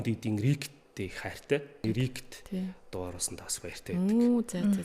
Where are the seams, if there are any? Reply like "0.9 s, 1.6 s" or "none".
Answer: 1.8 s